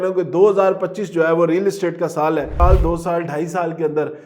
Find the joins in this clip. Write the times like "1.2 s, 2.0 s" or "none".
2.5 s

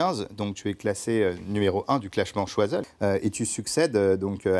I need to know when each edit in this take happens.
2.9 s

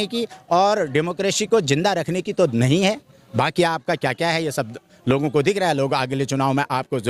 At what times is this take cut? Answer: none

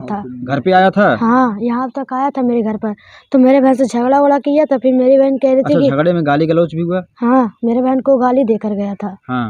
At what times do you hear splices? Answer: none

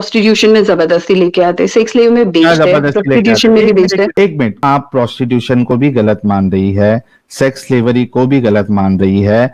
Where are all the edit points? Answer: 4.6 s

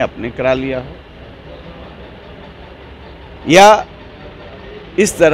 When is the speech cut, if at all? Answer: none

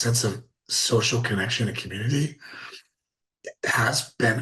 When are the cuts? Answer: none

